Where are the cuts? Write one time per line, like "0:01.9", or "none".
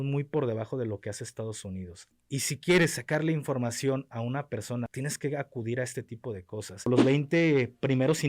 0:02.2
0:04.9
0:06.8